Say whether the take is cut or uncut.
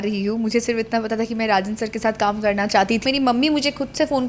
cut